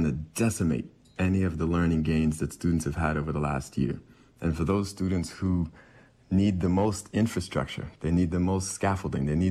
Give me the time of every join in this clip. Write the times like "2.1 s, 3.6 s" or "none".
none